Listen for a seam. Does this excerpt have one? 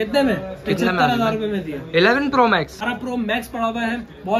yes; 1 cut; at 2.8 s

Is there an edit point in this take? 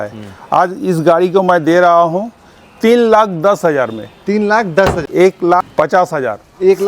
yes; 1 cut; at 5.0 s

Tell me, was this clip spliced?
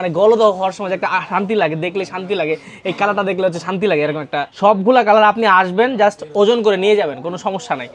yes; 1 cut; at 4.5 s

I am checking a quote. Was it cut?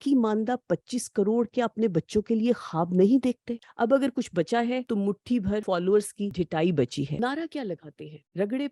yes; 4 cuts; at 3.5 s, 5.4 s, 6.3 s, 7.1 s

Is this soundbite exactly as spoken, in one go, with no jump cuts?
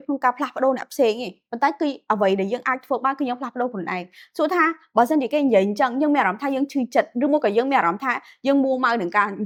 yes; 0 cuts

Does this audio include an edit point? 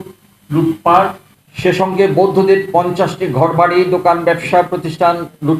no; 0 cuts

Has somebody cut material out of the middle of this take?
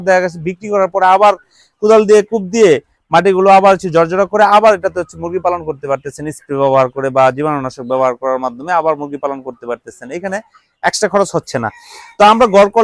no; 0 cuts

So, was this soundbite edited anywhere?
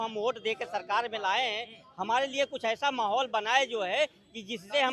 no; 0 cuts

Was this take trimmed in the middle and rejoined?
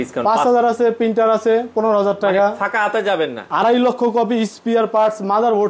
yes; 1 cut; at 3.4 s

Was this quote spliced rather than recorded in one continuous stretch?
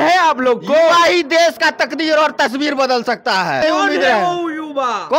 yes; 1 cut; at 3.6 s

